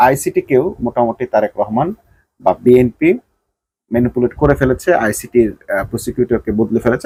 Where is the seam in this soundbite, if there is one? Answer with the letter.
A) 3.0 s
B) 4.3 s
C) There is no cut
C